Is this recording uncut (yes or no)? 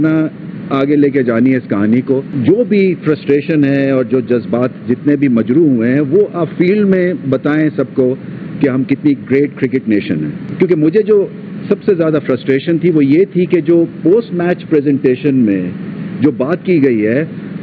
no